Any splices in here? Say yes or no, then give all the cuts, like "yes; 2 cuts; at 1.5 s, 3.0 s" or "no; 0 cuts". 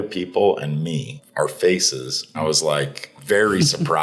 yes; 2 cuts; at 1.2 s, 2.4 s